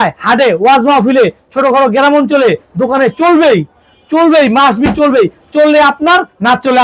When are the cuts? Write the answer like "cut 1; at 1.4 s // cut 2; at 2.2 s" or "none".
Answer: none